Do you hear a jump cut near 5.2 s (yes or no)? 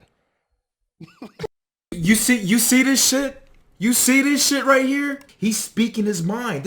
yes